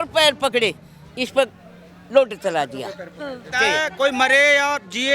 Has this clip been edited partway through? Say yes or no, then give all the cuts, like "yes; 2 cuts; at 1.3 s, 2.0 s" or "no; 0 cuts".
yes; 1 cut; at 3.5 s